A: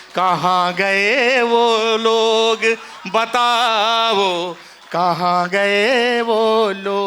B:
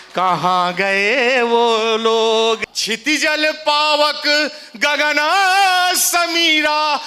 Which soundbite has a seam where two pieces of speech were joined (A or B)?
B